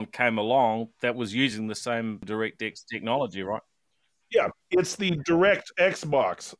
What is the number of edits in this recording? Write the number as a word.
one